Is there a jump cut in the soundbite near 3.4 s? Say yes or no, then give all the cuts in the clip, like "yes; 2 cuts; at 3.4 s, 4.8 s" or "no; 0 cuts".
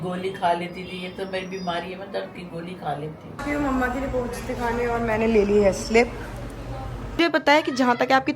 yes; 2 cuts; at 3.4 s, 7.2 s